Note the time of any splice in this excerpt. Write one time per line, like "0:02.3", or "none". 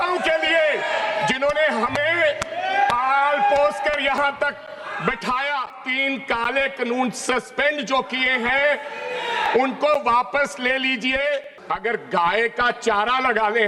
0:05.8
0:11.5